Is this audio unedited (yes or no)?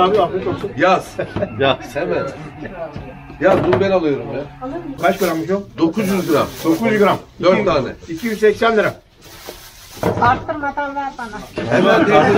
no